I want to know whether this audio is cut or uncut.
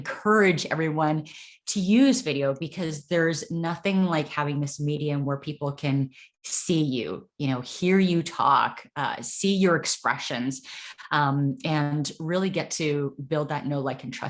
uncut